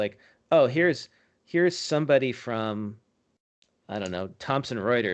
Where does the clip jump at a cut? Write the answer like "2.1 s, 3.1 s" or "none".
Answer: none